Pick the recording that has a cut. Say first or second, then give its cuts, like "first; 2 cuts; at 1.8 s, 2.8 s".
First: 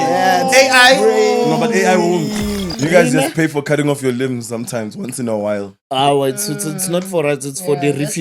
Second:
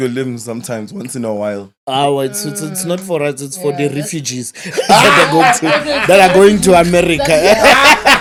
first; 1 cut; at 2.7 s